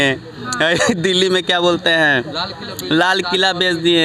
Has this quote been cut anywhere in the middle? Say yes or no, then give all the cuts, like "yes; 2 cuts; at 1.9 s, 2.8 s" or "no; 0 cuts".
no; 0 cuts